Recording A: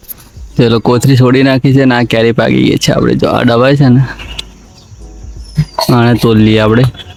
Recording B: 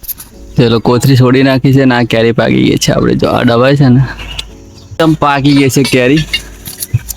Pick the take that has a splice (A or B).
B